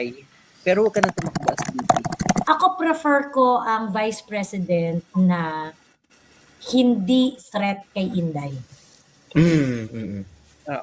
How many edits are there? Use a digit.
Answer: 1